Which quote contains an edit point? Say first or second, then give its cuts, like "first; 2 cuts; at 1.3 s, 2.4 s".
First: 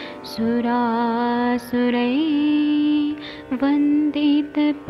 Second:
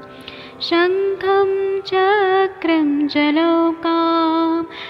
first; 1 cut; at 3.9 s